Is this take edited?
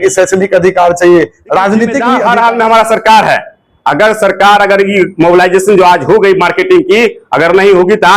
yes; 1 cut; at 2.1 s

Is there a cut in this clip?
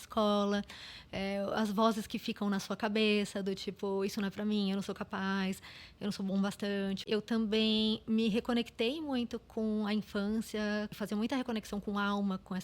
yes; 2 cuts; at 7.0 s, 11.0 s

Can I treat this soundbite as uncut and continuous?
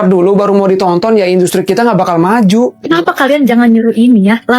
no; 1 cut; at 2.8 s

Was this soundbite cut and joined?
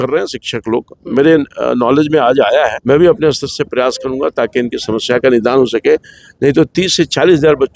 yes; 1 cut; at 2.8 s

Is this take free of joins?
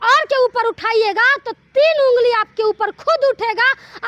yes; 0 cuts

